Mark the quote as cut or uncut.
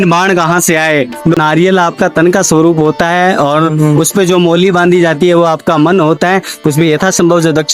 cut